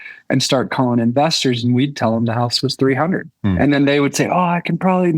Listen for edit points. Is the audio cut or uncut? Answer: cut